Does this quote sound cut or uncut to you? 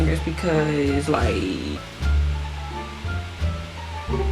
cut